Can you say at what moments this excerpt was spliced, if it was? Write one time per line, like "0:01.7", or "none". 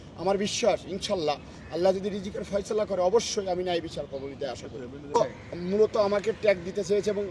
0:04.8